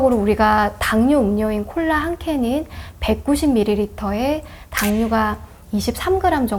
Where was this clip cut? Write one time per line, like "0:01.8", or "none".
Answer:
none